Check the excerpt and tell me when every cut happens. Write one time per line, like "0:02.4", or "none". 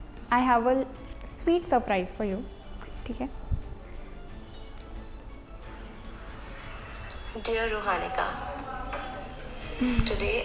none

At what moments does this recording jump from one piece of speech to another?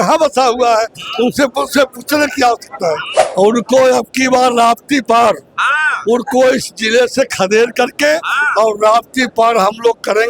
0:03.1

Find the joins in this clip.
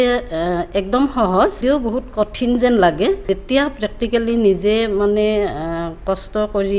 0:01.6
0:03.2

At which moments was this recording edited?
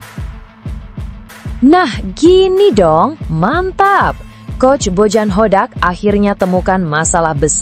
0:01.6

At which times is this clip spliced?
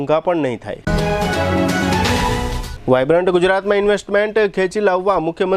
none

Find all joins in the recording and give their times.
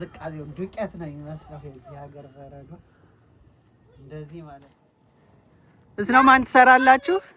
0:04.8

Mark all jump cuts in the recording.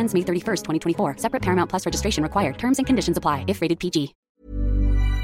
0:04.3

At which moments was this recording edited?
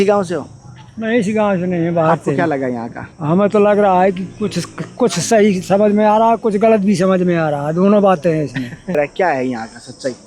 0:09.0

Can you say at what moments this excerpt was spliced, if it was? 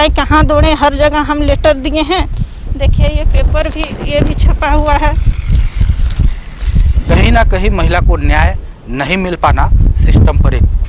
0:07.1

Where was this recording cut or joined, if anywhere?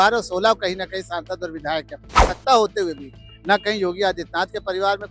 0:02.1

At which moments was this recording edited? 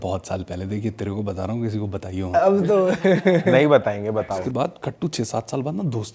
0:04.2

